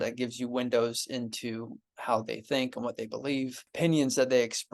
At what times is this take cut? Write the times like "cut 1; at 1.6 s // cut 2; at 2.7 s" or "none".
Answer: cut 1; at 3.6 s